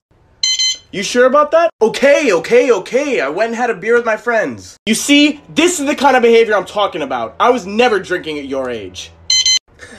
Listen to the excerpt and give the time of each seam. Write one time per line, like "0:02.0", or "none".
none